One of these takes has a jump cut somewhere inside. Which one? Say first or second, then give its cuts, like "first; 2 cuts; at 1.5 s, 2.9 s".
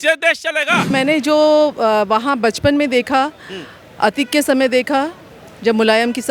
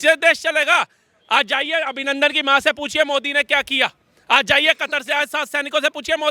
first; 1 cut; at 0.9 s